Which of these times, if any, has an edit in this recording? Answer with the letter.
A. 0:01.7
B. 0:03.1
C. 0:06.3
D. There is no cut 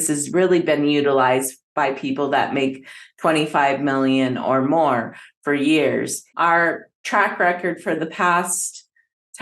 C